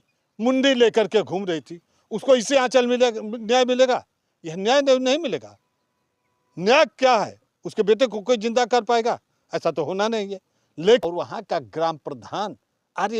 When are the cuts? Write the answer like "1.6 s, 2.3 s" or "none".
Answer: 11.0 s